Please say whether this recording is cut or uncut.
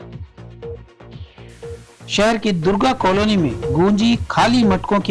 uncut